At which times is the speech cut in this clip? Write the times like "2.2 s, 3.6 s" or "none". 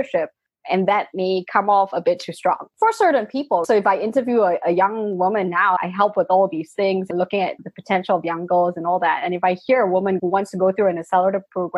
5.8 s